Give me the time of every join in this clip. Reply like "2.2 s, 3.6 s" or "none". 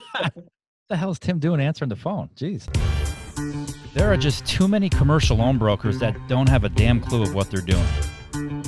2.7 s